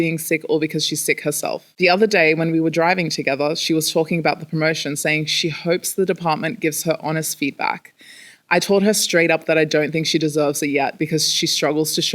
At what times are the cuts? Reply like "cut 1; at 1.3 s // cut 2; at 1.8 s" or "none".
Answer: cut 1; at 1.7 s